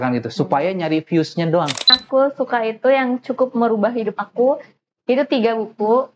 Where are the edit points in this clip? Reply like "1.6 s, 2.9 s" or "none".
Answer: 2.0 s